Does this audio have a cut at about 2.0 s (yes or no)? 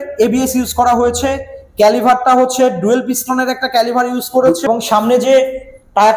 no